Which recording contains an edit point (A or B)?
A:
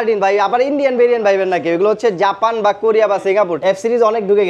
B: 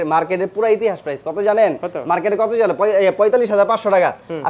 A